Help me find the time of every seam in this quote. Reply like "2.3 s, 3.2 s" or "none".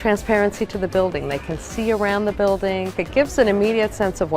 3.0 s